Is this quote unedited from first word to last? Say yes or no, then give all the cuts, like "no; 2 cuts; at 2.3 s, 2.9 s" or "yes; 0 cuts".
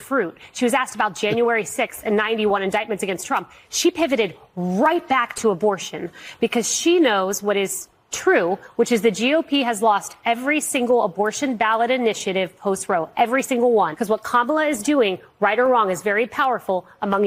no; 1 cut; at 14.0 s